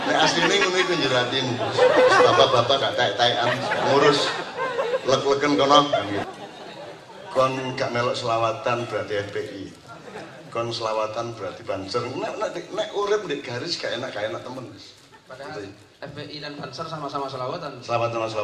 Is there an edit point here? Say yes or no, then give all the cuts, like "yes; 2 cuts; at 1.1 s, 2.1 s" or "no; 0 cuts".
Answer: yes; 1 cut; at 6.2 s